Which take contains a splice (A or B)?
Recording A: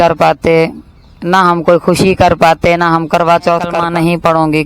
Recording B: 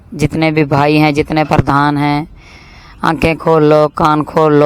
A